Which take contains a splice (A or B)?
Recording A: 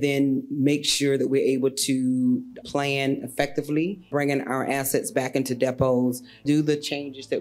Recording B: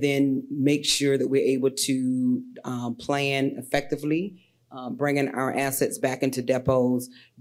A